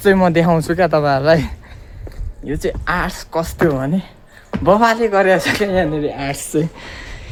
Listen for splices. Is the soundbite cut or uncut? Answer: uncut